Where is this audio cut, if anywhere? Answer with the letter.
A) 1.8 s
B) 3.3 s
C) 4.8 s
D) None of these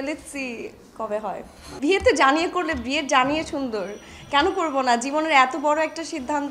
A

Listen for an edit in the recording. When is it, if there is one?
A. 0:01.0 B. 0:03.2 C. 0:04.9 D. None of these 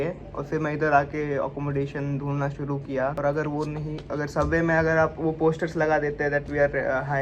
B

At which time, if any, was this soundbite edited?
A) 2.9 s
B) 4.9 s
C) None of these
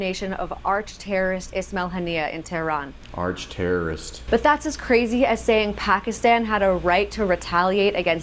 C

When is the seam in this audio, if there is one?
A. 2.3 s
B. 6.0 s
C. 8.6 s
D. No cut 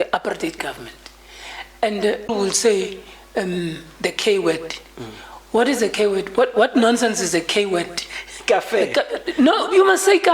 A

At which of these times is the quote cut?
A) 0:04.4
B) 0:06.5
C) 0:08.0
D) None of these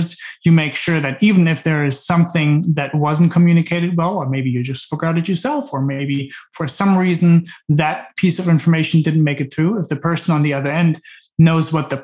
D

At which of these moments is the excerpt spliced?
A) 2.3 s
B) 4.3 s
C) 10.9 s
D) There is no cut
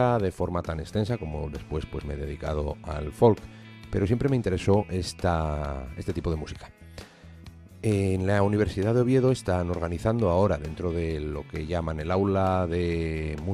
C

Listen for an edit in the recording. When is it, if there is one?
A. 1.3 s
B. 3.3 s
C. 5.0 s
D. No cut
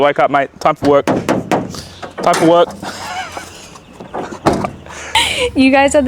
C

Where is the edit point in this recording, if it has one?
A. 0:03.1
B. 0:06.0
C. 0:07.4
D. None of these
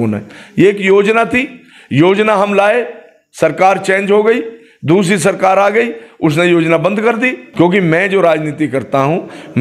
C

